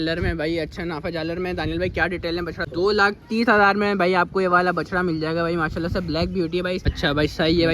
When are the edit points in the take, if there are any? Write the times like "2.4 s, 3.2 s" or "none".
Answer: 2.6 s, 6.8 s